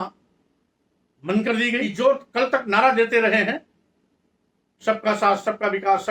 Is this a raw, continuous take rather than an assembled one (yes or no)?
no